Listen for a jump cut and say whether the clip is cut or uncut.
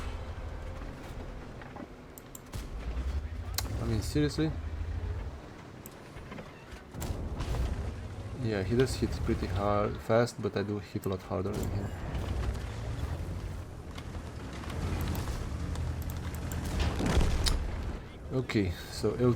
uncut